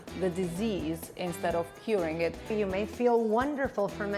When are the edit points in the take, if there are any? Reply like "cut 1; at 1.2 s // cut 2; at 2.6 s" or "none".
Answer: cut 1; at 2.4 s